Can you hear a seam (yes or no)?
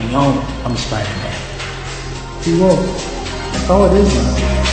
no